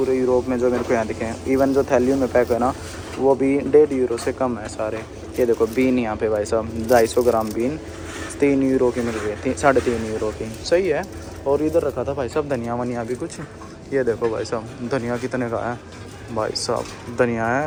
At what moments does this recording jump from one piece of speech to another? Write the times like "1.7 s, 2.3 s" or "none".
none